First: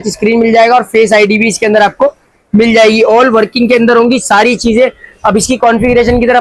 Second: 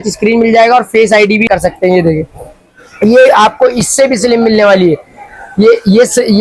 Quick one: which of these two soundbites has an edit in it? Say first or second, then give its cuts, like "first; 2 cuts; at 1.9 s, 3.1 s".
second; 1 cut; at 1.5 s